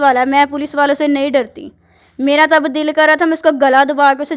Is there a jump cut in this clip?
no; 0 cuts

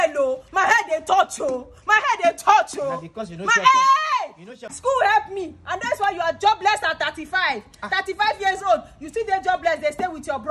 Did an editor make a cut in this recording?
yes; 1 cut; at 4.7 s

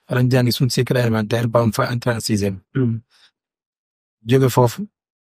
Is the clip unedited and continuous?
yes; 0 cuts

